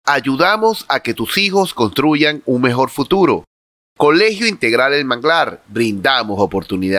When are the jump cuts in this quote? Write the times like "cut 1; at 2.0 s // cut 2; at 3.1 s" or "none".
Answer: none